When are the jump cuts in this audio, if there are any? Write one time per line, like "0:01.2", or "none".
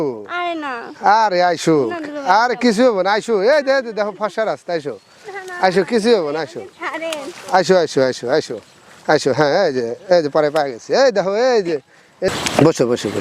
0:12.3